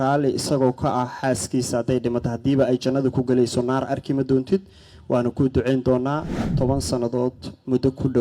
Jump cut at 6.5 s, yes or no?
yes